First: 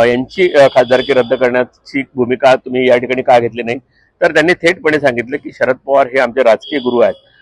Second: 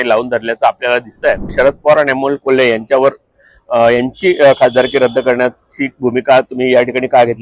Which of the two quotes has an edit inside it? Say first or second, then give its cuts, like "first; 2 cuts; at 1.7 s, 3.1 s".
second; 1 cut; at 1.5 s